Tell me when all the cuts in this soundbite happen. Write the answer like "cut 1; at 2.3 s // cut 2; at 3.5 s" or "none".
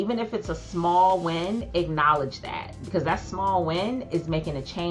none